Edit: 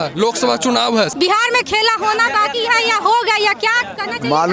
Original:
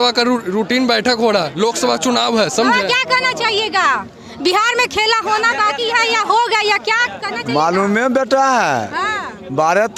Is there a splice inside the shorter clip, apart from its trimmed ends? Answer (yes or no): yes